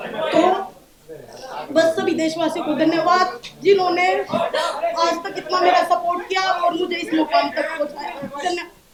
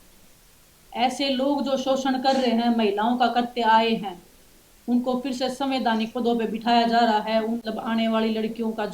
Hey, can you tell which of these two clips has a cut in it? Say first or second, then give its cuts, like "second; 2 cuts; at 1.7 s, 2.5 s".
second; 1 cut; at 7.6 s